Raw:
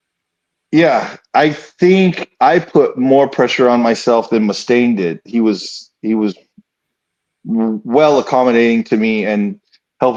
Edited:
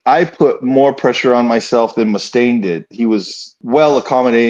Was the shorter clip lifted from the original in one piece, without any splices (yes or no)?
no